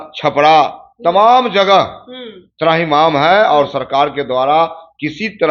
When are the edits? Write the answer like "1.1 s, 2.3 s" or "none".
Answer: none